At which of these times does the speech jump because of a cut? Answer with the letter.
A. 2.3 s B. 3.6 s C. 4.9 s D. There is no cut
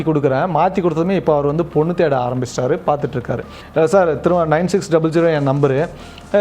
B